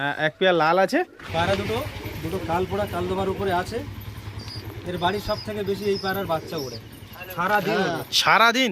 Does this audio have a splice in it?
yes; 1 cut; at 1.2 s

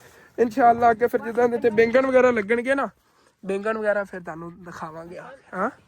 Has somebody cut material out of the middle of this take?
no; 0 cuts

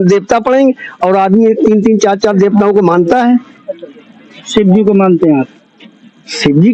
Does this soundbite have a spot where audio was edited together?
no; 0 cuts

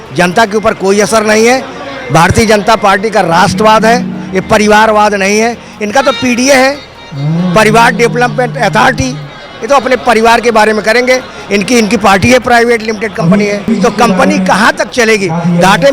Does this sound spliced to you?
yes; 1 cut; at 13.7 s

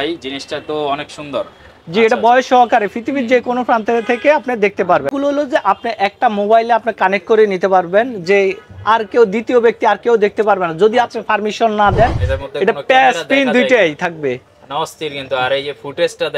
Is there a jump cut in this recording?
yes; 2 cuts; at 5.1 s, 12.3 s

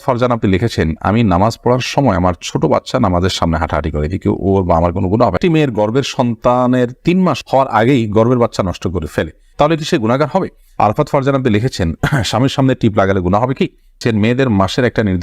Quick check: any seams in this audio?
yes; 3 cuts; at 5.4 s, 10.7 s, 14.0 s

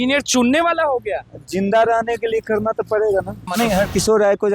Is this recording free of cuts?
no; 1 cut; at 3.5 s

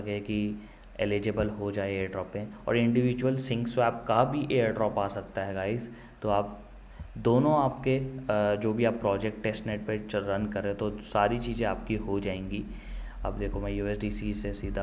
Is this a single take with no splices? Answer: yes; 0 cuts

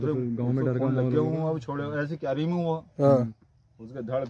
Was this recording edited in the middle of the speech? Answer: no; 0 cuts

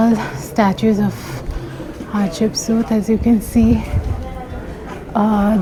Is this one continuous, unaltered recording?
yes; 0 cuts

